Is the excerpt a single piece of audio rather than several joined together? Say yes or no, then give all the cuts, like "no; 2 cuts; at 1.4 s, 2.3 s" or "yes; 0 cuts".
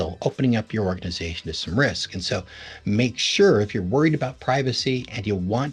yes; 0 cuts